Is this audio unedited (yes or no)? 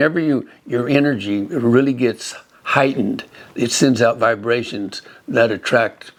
yes